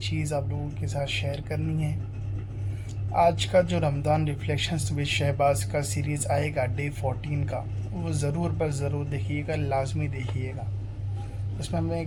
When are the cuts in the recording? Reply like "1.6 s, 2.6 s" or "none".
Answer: none